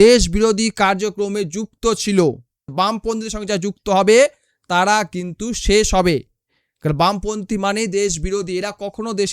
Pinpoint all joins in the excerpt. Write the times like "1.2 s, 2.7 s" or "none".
2.6 s